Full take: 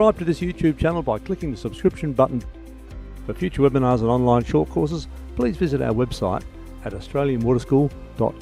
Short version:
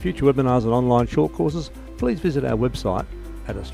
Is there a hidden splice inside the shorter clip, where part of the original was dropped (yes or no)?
no